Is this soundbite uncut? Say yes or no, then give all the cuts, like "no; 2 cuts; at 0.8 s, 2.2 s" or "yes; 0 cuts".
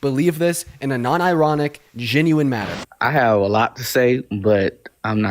no; 1 cut; at 2.8 s